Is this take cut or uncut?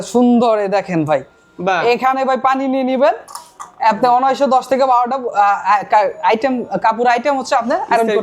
uncut